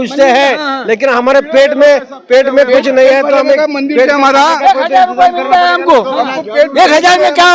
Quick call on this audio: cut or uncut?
uncut